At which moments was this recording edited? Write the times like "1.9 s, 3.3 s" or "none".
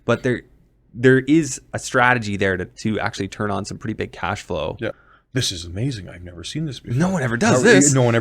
5.1 s

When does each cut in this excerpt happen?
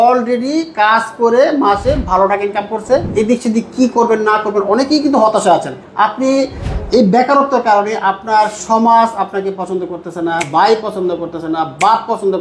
3.1 s, 5.8 s, 10.5 s

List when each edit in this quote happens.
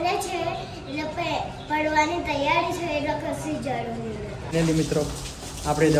4.5 s

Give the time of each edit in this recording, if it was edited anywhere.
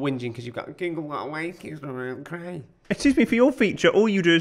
2.7 s

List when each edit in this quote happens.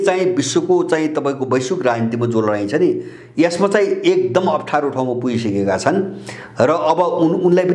none

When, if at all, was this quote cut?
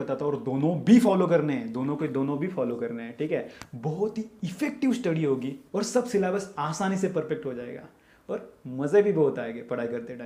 none

